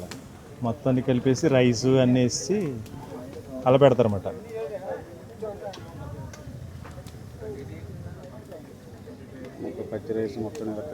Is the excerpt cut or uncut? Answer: uncut